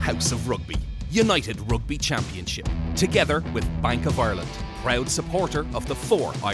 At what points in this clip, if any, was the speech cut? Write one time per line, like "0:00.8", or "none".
none